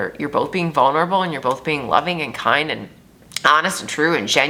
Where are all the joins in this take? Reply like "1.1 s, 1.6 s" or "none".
none